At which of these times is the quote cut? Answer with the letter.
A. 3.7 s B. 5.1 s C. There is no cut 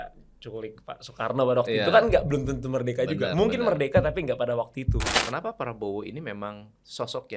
B